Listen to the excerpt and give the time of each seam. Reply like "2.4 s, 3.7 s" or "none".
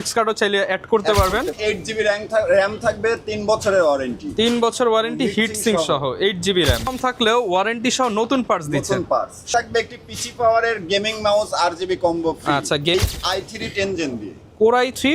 1.5 s, 6.9 s, 9.5 s, 12.9 s